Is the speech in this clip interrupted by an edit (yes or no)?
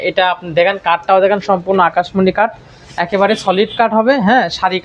no